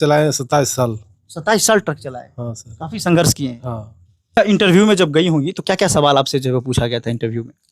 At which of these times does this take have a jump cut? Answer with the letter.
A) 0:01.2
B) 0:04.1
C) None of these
B